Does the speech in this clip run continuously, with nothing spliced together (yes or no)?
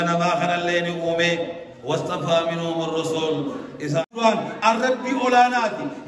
no